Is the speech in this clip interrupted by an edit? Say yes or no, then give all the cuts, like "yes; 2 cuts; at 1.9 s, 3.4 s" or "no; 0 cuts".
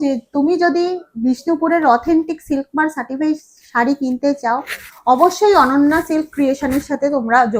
no; 0 cuts